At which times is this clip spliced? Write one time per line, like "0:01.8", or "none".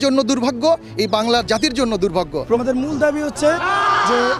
0:02.6